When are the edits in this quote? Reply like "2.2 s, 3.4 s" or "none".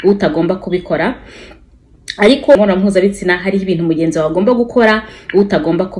2.6 s